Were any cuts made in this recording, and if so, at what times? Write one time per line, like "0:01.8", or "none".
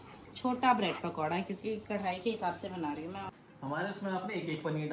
0:03.3